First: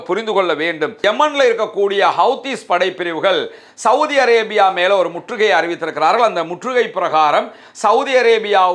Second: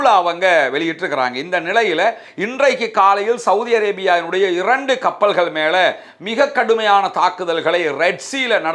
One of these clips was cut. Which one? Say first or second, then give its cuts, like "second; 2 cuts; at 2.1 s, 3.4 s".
first; 1 cut; at 0.9 s